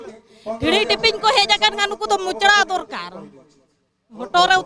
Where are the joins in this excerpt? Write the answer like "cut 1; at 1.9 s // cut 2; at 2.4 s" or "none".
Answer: none